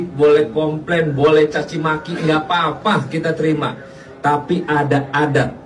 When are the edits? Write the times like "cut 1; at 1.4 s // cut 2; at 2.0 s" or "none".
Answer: none